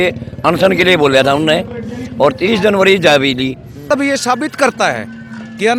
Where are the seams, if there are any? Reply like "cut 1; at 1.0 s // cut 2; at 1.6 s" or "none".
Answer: cut 1; at 3.9 s